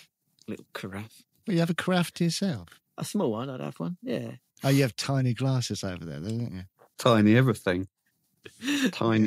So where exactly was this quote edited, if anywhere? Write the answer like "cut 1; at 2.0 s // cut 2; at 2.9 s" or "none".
cut 1; at 7.0 s